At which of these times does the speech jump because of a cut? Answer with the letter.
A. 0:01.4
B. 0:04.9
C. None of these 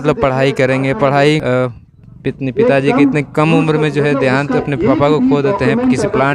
A